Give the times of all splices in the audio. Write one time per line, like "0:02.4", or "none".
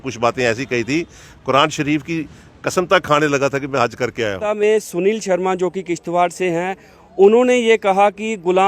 0:04.4